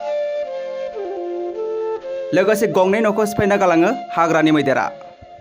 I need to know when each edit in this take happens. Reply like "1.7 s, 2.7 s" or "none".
2.3 s